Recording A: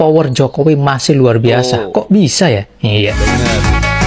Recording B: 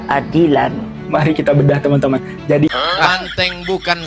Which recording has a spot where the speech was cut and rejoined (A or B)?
B